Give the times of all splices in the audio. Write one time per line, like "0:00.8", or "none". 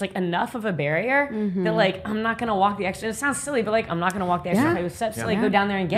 none